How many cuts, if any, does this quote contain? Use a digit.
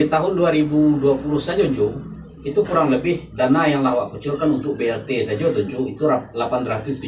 0